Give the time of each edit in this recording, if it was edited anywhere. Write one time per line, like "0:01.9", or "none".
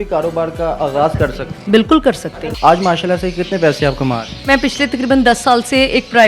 0:02.4
0:04.5